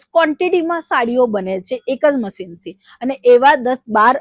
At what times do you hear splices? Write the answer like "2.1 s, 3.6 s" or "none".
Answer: none